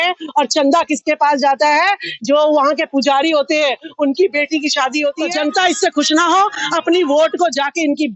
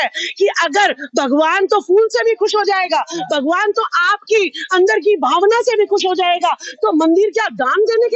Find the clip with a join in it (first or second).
first